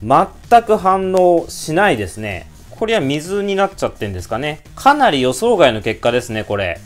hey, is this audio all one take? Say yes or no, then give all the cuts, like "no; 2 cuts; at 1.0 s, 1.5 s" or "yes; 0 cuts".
yes; 0 cuts